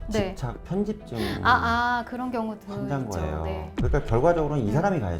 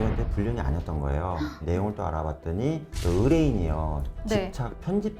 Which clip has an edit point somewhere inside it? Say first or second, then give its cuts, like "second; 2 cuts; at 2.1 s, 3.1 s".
second; 1 cut; at 1.6 s